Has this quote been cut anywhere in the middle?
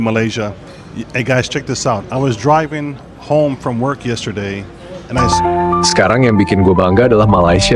yes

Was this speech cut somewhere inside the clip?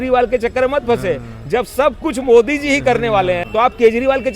yes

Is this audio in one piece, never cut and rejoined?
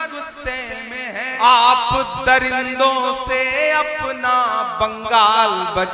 no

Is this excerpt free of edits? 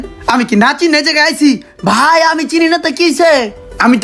yes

